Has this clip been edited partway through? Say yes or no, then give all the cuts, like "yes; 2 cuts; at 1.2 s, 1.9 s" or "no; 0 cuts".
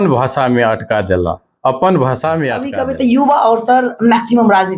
yes; 1 cut; at 2.7 s